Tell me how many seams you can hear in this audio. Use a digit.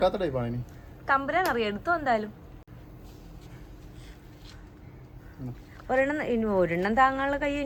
0